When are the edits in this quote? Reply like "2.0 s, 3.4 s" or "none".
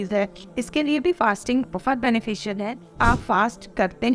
3.0 s